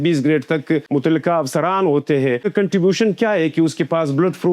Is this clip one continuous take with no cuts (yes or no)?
no